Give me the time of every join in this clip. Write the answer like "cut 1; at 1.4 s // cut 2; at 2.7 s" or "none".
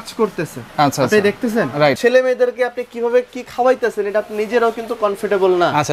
cut 1; at 2.0 s